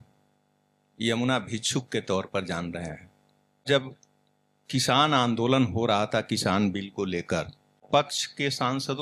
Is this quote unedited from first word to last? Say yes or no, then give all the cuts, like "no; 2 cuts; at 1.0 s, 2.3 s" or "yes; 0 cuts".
no; 2 cuts; at 3.6 s, 7.8 s